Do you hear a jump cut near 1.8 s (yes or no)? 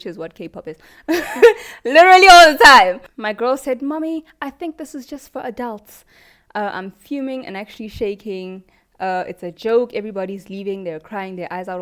no